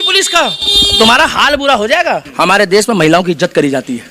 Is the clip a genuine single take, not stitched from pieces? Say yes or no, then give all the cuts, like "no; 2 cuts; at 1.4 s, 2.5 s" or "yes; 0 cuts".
no; 1 cut; at 2.3 s